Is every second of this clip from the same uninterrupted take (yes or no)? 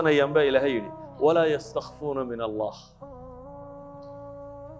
yes